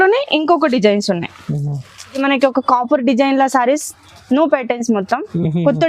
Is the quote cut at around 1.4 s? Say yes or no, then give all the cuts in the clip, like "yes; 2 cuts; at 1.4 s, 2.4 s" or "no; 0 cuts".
yes; 1 cut; at 1.4 s